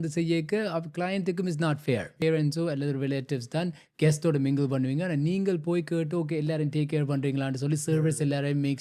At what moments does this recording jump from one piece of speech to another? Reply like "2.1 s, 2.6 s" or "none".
2.2 s